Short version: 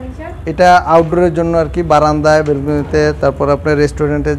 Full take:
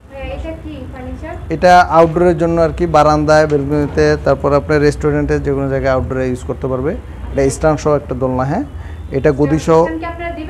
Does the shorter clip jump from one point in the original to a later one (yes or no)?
no